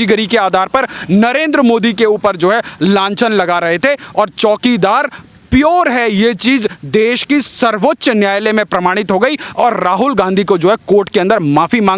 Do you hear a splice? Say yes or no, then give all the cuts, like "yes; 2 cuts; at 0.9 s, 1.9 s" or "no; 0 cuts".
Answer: no; 0 cuts